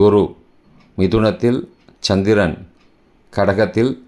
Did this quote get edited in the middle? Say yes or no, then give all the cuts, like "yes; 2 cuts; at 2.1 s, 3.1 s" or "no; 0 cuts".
no; 0 cuts